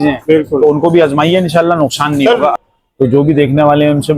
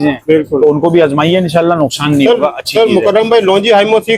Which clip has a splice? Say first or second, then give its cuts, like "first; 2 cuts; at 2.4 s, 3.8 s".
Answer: first; 1 cut; at 2.6 s